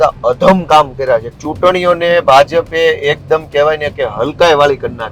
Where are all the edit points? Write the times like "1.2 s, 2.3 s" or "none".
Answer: 1.4 s